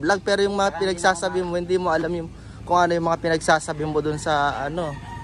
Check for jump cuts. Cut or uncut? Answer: uncut